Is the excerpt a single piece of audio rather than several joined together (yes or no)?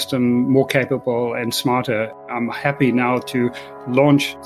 no